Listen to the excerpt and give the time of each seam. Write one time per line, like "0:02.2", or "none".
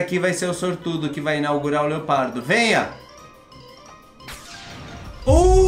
none